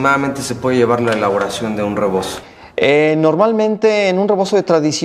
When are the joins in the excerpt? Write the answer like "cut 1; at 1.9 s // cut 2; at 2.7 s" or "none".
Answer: none

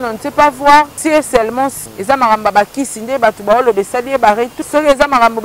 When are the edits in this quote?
cut 1; at 1.4 s // cut 2; at 4.6 s

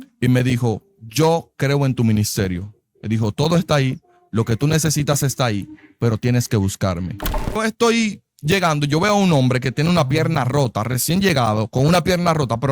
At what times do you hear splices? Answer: cut 1; at 7.6 s

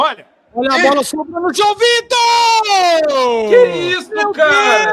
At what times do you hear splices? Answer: cut 1; at 3.4 s

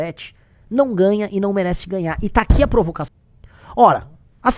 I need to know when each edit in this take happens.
cut 1; at 3.1 s

